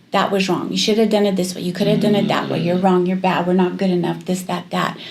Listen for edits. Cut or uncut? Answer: uncut